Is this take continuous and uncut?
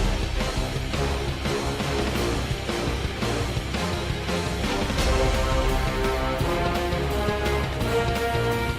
yes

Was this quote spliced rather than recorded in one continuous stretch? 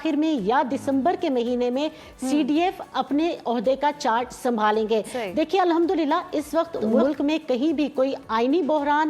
no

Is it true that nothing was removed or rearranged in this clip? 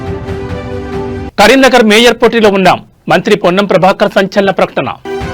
no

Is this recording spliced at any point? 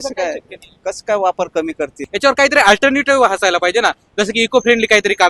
yes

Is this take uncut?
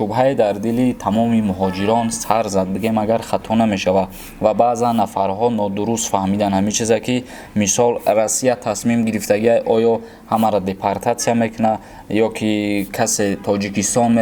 yes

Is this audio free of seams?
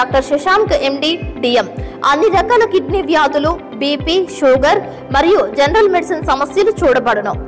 yes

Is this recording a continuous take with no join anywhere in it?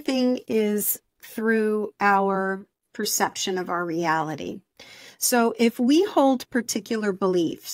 yes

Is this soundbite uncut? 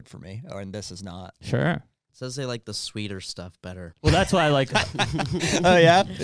no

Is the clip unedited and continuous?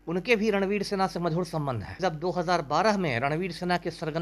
no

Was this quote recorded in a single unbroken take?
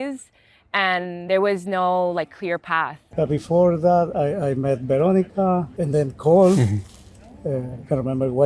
no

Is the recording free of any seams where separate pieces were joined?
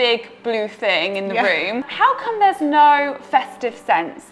no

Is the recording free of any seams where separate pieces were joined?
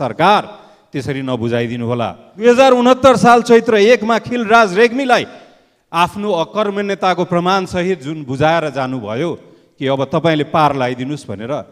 no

